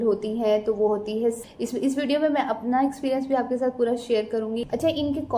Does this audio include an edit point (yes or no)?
yes